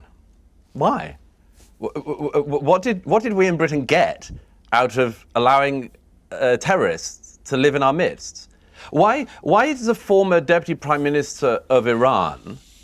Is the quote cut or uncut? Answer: cut